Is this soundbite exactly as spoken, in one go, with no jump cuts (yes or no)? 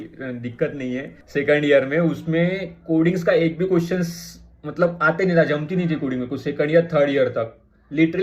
no